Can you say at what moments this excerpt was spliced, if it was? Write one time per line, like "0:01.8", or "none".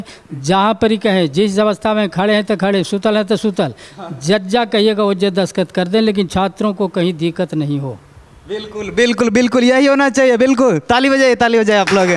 none